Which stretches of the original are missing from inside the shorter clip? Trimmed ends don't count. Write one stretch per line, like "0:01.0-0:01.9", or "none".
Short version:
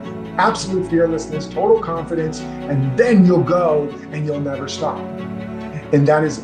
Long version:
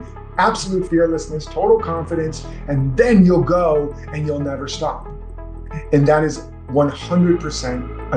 none